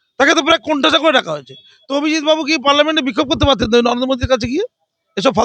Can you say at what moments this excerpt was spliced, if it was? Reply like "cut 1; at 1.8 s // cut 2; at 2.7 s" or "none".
none